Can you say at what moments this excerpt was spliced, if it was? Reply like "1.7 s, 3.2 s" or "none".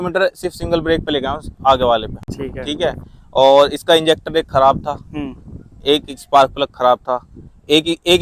none